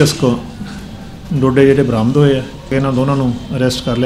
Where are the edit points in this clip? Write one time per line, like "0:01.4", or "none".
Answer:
0:02.7